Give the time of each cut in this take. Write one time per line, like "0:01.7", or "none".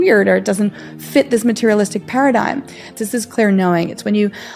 0:02.9